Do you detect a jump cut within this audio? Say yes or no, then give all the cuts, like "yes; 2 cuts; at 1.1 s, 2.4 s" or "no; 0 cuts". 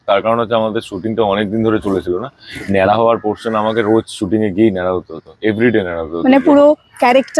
no; 0 cuts